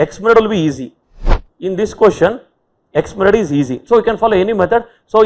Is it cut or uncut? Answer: cut